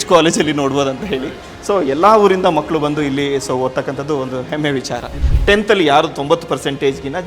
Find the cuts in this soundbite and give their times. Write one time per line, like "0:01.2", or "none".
0:05.1